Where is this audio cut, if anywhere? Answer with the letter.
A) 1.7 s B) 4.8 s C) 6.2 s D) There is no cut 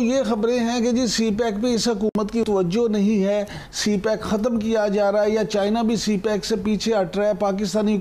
D